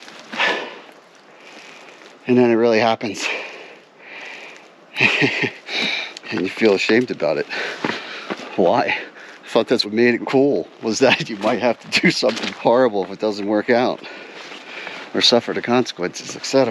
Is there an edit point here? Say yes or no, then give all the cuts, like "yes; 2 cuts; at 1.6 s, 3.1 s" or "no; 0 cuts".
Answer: yes; 2 cuts; at 9.9 s, 12.5 s